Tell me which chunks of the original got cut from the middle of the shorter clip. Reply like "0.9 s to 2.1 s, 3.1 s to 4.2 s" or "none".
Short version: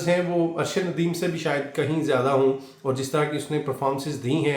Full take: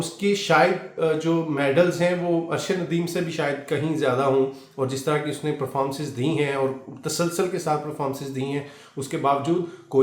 none